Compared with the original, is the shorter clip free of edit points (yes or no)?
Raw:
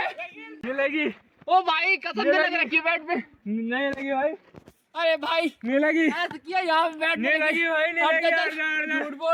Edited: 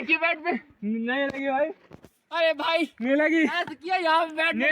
yes